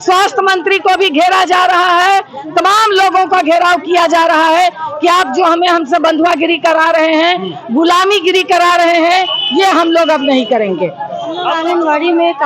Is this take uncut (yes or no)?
no